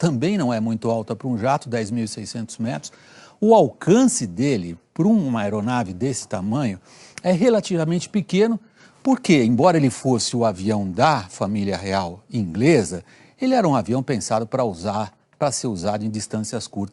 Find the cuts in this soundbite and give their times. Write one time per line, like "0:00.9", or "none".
0:09.2